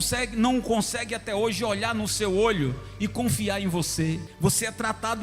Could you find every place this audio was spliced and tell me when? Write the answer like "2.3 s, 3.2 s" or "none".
4.3 s